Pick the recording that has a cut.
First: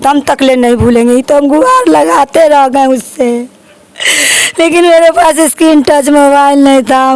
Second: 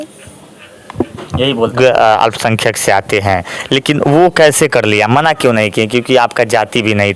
second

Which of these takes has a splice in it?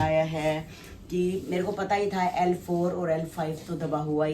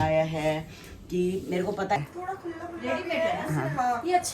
second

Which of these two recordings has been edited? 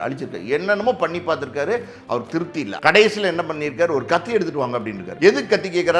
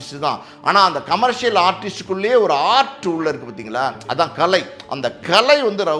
first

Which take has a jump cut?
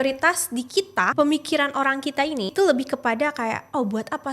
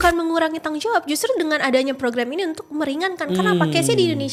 first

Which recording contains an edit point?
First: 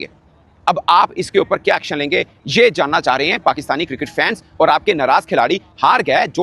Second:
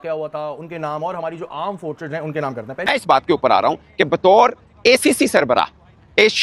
second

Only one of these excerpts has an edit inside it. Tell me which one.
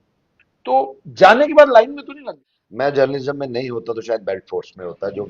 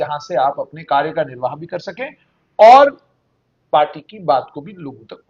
first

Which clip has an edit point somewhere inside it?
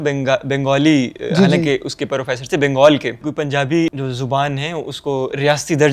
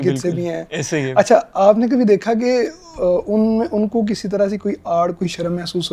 first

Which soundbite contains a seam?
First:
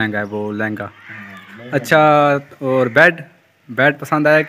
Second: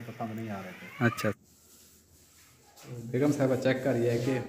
second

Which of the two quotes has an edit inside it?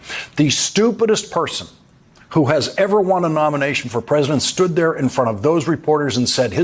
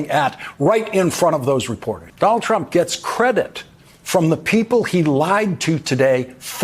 second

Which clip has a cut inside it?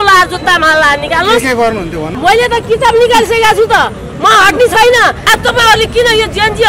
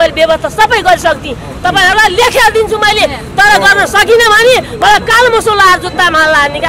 first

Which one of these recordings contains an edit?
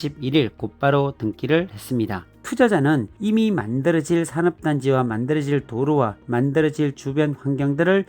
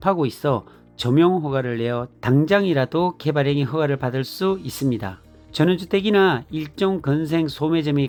first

